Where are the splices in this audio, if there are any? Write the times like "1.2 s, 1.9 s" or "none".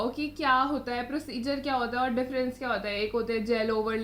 none